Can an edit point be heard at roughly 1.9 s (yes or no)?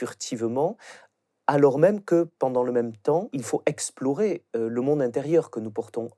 no